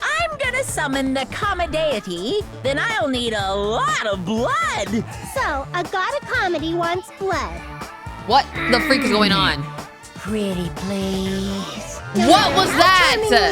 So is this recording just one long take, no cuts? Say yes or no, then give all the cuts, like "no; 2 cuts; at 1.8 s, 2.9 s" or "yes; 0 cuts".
yes; 0 cuts